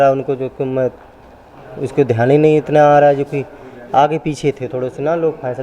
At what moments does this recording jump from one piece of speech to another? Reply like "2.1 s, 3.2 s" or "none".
none